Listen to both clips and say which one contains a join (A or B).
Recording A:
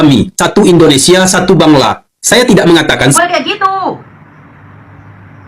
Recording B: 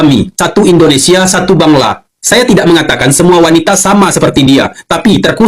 A